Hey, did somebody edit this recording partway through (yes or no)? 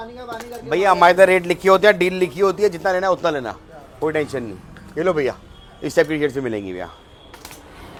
no